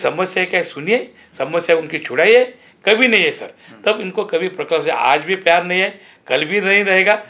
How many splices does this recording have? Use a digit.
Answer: 0